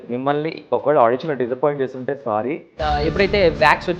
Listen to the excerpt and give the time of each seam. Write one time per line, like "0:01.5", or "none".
0:02.7